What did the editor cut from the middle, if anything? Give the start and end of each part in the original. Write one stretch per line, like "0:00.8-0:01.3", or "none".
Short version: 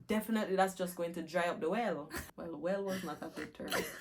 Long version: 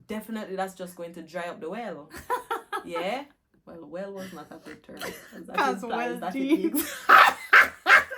0:02.1-0:03.4